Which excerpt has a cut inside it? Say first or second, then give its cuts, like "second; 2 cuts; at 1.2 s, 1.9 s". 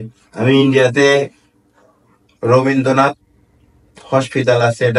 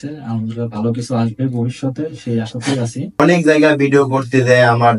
second; 1 cut; at 3.2 s